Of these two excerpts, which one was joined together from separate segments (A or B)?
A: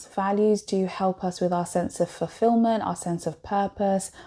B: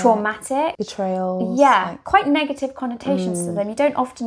B